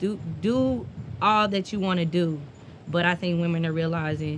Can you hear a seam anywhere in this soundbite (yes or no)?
no